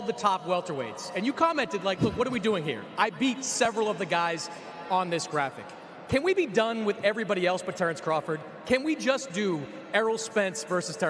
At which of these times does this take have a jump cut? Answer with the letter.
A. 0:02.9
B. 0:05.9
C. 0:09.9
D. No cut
D